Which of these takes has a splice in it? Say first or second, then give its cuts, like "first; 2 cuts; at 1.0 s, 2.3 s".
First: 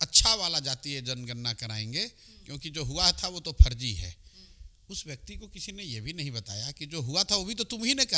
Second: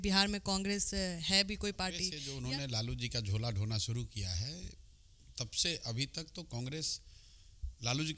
second; 1 cut; at 2.2 s